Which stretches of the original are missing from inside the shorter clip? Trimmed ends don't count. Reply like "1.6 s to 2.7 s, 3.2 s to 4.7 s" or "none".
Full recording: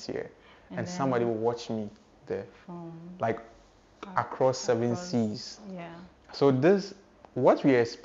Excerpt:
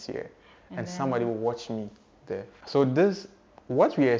2.5 s to 6.2 s